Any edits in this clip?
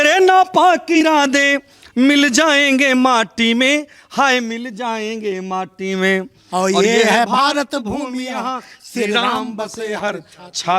yes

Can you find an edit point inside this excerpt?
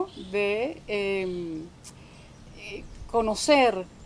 no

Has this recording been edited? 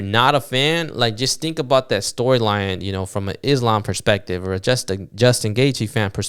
no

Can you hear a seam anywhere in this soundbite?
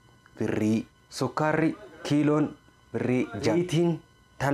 yes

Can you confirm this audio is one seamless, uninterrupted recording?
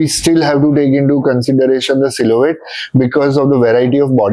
yes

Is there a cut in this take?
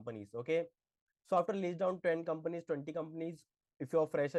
no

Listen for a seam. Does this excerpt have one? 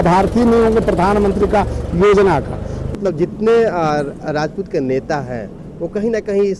yes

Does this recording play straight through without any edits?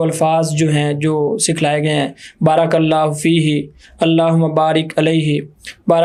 yes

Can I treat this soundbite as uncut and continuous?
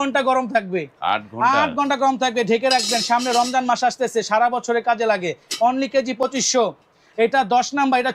yes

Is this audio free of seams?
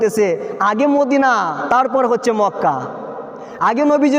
yes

